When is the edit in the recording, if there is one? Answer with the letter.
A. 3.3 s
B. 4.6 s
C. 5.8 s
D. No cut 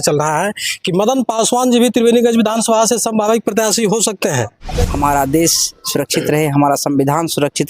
B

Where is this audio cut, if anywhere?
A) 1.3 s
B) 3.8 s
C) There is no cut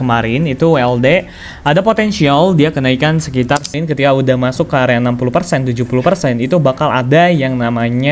B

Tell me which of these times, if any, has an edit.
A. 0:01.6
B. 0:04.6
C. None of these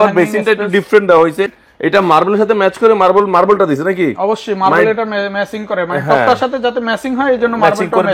A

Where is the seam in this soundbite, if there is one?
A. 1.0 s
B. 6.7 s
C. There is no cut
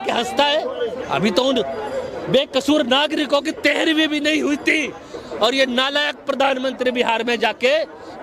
A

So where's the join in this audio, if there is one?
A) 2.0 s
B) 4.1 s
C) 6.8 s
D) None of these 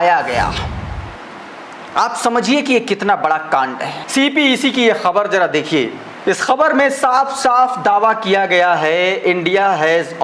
B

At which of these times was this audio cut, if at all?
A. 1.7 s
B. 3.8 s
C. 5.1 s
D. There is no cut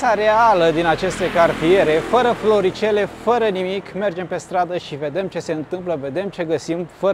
D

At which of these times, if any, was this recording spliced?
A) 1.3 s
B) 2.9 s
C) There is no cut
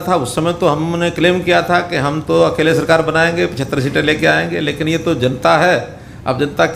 C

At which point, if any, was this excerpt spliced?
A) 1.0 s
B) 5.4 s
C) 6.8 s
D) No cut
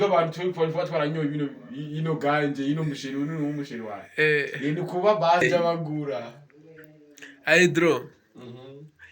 B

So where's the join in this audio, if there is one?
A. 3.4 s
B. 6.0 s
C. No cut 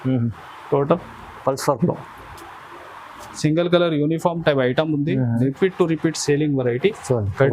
A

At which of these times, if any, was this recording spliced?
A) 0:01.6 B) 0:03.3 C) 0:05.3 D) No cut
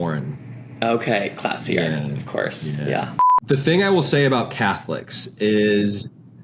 B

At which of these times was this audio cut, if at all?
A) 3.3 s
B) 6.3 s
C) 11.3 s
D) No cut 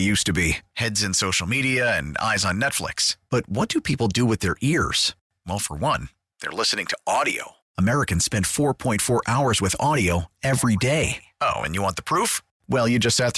D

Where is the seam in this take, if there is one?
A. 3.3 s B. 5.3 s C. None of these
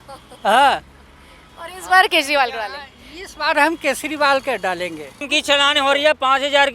B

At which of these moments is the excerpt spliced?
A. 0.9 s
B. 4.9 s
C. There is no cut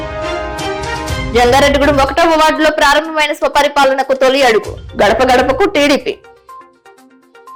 C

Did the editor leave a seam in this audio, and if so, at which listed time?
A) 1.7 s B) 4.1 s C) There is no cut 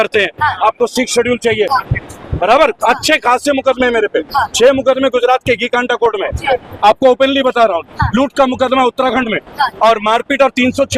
A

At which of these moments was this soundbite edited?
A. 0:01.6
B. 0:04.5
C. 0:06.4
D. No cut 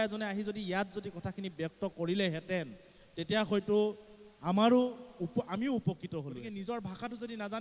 C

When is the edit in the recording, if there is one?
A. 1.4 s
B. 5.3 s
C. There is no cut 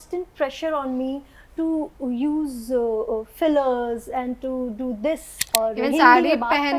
B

